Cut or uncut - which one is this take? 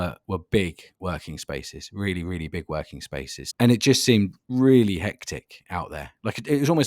cut